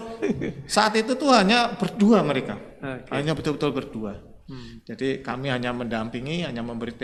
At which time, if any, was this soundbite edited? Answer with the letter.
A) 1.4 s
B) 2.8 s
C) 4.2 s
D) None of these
D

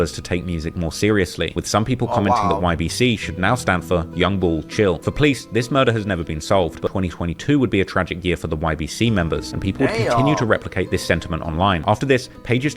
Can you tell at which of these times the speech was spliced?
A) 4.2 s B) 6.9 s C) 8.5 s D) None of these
B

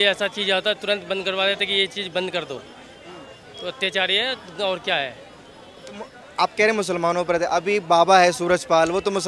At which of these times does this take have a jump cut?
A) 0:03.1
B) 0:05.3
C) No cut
C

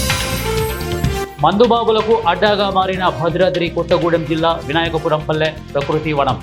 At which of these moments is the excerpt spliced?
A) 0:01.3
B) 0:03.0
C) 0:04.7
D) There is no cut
A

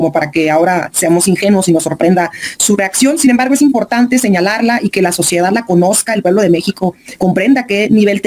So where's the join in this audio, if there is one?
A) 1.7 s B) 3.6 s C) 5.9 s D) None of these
D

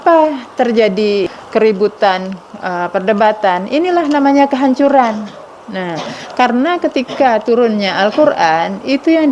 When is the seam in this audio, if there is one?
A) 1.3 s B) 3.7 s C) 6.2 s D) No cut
A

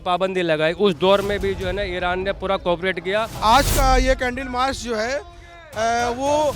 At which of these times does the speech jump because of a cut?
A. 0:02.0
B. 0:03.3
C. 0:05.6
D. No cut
B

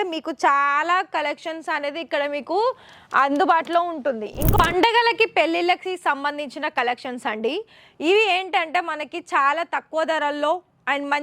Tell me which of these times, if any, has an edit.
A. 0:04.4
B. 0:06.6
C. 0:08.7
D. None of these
A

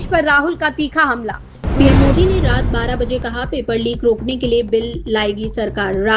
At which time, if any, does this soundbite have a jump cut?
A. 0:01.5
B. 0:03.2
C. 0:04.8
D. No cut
A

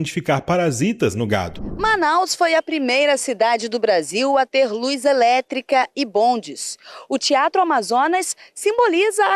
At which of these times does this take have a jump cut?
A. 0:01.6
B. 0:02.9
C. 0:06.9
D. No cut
A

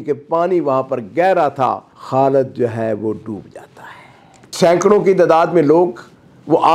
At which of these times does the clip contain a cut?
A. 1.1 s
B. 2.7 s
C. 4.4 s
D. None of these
C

